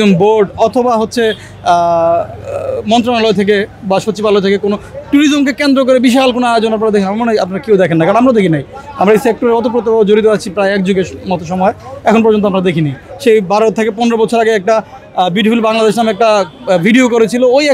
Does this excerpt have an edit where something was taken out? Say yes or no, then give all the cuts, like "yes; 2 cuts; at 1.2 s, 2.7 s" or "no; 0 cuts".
no; 0 cuts